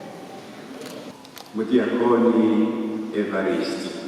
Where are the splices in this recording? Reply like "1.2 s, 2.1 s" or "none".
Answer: 1.1 s